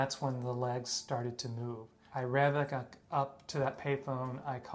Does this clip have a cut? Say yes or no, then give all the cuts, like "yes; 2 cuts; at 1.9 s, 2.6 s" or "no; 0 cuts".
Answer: yes; 1 cut; at 2.0 s